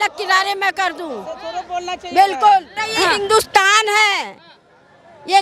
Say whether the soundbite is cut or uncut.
cut